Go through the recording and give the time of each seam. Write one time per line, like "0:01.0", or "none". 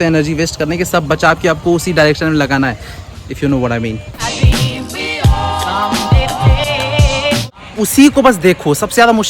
none